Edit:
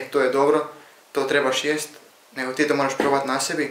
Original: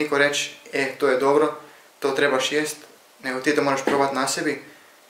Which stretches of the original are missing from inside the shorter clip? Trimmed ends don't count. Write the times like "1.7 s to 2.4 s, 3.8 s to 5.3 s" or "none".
none